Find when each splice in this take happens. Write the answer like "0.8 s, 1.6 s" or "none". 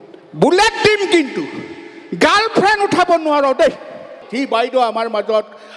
4.2 s